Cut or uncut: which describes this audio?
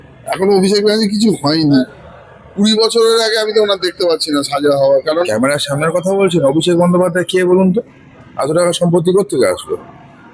cut